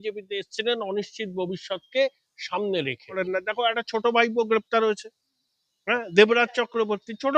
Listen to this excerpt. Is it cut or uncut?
cut